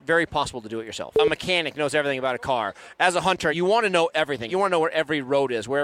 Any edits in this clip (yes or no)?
yes